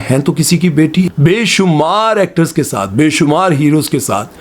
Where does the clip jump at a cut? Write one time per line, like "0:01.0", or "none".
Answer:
0:01.1